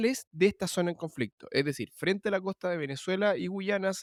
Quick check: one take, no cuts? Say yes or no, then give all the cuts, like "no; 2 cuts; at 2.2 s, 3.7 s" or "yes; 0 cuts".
yes; 0 cuts